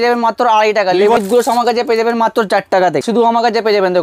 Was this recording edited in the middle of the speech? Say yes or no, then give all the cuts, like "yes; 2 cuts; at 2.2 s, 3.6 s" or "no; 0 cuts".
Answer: yes; 2 cuts; at 1.2 s, 3.0 s